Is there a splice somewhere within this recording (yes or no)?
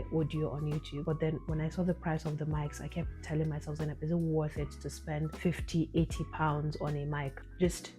yes